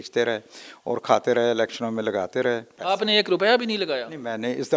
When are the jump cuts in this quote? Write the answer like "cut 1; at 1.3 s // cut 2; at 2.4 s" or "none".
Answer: cut 1; at 2.8 s